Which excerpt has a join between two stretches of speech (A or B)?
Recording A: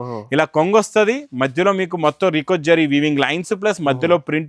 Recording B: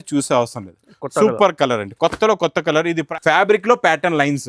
B